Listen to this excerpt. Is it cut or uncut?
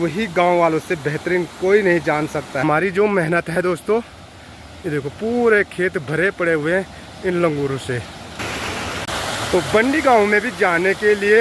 cut